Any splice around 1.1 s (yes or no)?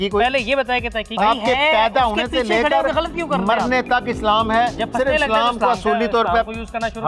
yes